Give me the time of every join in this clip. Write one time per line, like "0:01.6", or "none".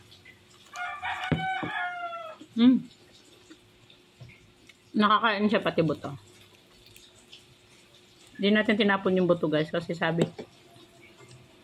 none